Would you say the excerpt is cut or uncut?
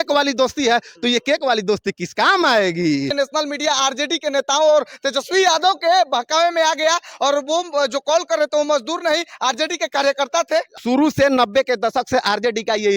cut